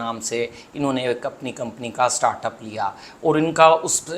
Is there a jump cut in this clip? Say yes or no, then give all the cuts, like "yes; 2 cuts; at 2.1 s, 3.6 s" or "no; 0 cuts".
no; 0 cuts